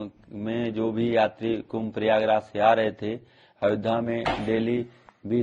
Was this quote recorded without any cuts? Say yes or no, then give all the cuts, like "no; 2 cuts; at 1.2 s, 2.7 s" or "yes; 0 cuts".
yes; 0 cuts